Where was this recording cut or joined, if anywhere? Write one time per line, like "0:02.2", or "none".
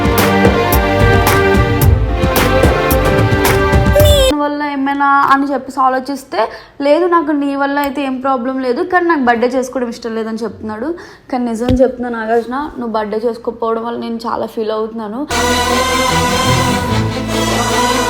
0:04.4

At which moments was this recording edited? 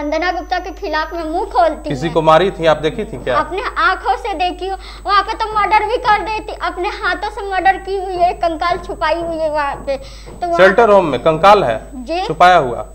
none

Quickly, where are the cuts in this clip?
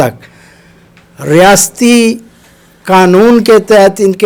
none

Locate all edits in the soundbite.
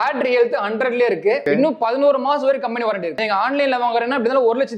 0:01.4
0:03.1

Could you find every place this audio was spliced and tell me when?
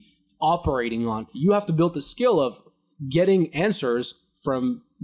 0:01.3

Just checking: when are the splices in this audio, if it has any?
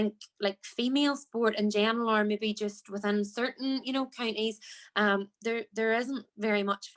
none

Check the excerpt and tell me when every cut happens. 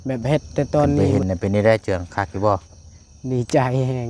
0:01.1

